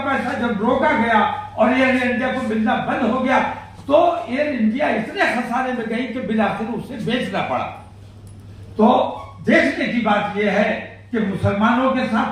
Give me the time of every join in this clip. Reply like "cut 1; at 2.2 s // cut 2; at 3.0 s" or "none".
none

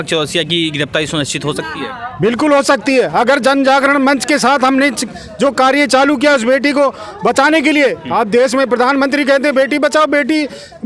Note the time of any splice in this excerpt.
none

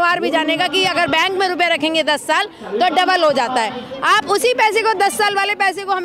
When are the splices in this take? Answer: none

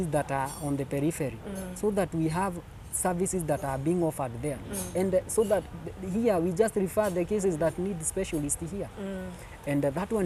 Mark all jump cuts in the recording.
none

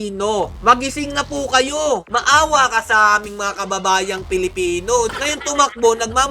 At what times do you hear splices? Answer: cut 1; at 2.1 s // cut 2; at 5.1 s

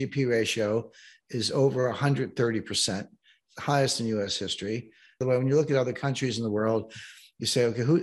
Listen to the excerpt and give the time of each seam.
cut 1; at 5.2 s

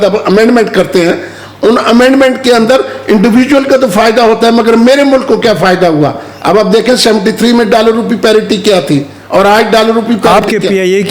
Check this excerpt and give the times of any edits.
none

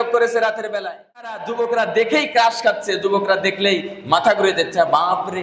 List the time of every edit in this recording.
cut 1; at 1.4 s

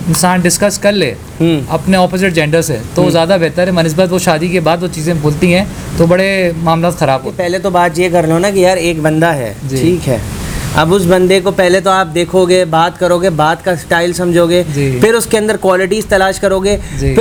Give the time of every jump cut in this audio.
none

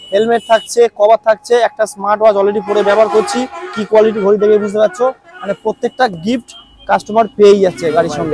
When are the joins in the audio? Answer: none

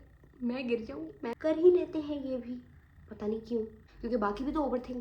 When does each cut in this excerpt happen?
cut 1; at 1.3 s // cut 2; at 3.8 s

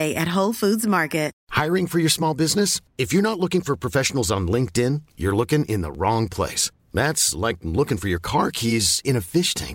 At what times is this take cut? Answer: cut 1; at 1.4 s

